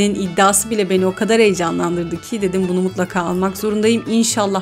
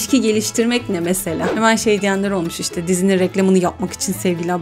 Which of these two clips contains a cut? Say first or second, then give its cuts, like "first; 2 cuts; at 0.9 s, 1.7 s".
second; 1 cut; at 1.5 s